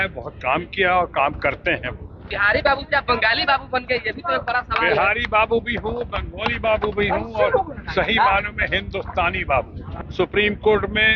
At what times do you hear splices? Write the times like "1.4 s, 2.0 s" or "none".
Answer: 2.3 s, 9.8 s